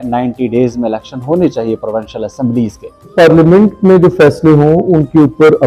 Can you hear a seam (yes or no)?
yes